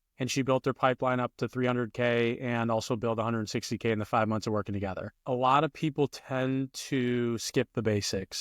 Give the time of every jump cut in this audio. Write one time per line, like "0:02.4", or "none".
0:05.2